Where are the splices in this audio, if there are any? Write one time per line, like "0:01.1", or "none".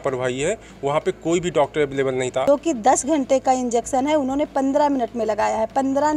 0:02.4